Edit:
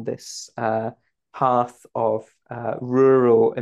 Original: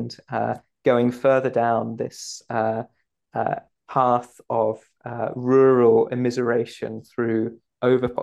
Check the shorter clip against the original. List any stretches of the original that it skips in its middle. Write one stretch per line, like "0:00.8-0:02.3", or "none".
0:03.1-0:03.8

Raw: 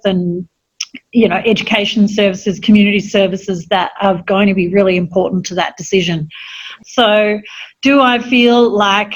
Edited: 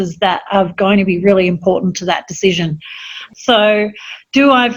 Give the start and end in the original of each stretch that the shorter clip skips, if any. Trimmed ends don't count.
none

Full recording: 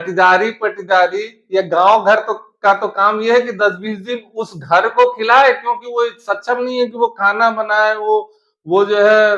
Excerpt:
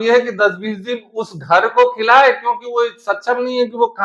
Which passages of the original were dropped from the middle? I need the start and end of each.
none

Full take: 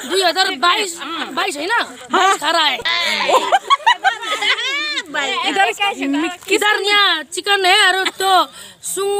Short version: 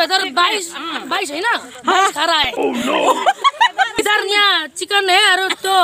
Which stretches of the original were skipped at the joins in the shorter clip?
0:04.2-0:06.5

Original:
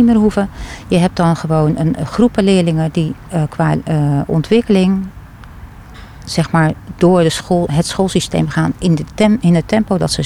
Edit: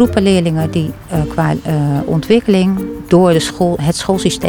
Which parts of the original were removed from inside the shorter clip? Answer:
0:05.2-0:06.9

